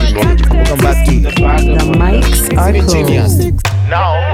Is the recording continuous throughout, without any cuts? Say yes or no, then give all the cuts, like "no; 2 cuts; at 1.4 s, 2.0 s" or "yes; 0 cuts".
yes; 0 cuts